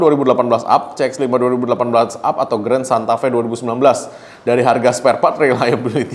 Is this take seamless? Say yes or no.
yes